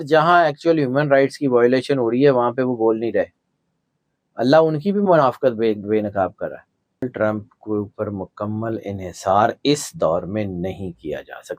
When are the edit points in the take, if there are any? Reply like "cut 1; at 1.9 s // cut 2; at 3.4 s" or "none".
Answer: cut 1; at 7.0 s